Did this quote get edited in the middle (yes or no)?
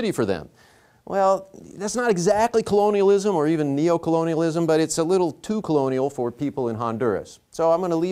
yes